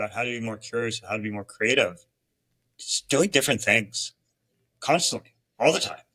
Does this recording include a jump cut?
no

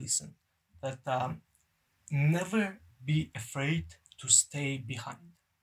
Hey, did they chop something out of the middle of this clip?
no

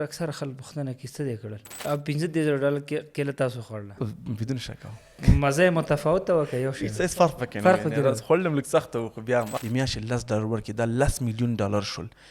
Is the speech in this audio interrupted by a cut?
yes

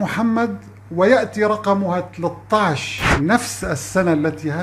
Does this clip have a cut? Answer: no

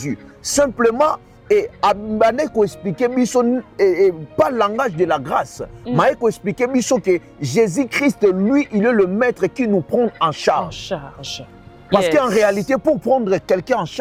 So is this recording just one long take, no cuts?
yes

